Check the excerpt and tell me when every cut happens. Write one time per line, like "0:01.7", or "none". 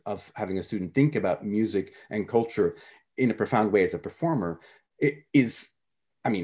none